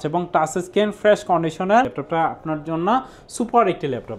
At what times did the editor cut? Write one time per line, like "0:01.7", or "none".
0:02.0